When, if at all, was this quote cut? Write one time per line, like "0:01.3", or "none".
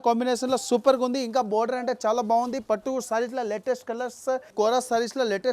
0:04.5